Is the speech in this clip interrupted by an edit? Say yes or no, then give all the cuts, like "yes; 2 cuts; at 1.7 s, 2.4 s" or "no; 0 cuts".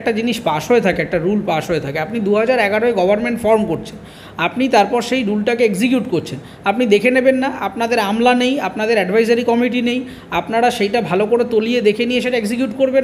no; 0 cuts